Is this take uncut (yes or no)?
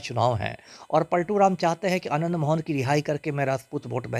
yes